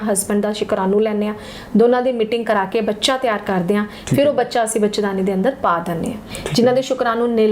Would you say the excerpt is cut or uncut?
cut